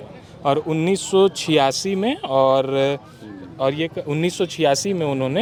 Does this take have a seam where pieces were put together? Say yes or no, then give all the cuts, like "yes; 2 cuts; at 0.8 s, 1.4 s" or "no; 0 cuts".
no; 0 cuts